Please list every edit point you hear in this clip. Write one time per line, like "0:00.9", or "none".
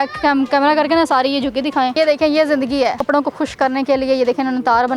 0:01.9
0:03.0